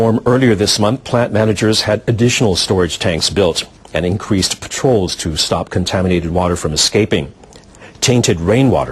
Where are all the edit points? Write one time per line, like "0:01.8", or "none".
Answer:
0:04.1